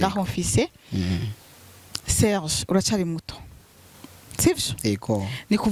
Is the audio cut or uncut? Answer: uncut